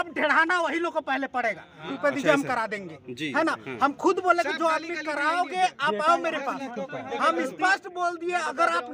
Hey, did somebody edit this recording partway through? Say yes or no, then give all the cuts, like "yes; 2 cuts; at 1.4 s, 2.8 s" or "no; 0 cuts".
yes; 1 cut; at 1.9 s